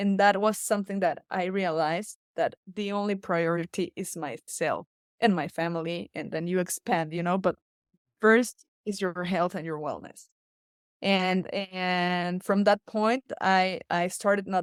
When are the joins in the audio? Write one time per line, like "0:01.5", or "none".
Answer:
none

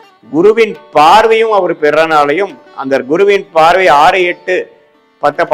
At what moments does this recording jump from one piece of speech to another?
none

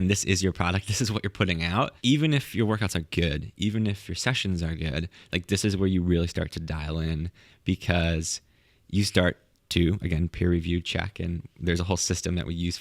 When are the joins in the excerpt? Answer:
0:01.9

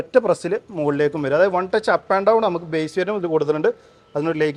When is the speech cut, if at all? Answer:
none

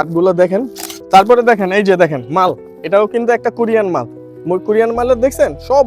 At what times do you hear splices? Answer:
0:01.0

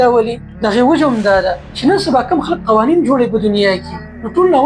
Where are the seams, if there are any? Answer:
none

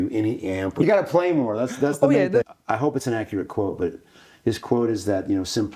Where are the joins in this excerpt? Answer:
0:00.8
0:02.4

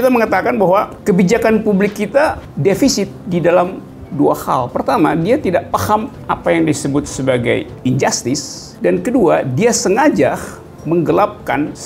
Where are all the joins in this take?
none

